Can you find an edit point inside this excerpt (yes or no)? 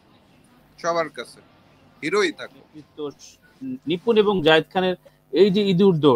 yes